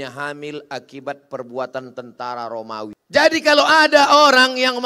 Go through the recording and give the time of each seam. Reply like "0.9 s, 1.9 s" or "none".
3.0 s